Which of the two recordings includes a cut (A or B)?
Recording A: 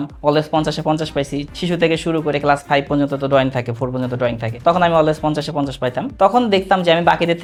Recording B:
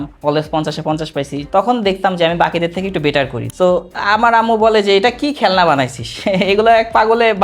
B